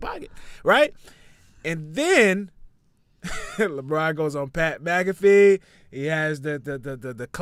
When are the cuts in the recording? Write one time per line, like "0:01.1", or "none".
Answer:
none